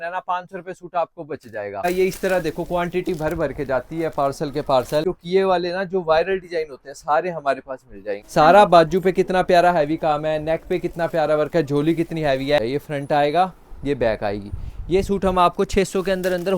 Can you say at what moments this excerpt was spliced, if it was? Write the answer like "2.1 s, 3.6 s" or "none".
1.8 s, 5.0 s, 8.2 s, 12.6 s